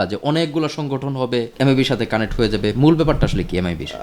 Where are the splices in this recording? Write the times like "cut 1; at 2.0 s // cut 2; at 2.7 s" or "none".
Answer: cut 1; at 1.5 s